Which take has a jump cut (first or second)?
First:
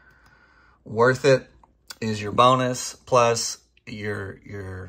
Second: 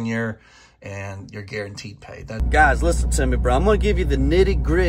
second